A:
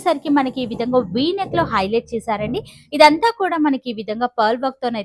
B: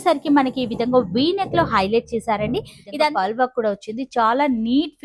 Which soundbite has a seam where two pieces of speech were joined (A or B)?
B